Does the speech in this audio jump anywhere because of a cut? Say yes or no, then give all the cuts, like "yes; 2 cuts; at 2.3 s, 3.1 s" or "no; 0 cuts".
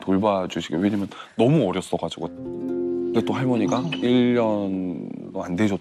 no; 0 cuts